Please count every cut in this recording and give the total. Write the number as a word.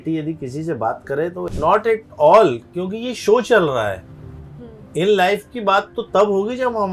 one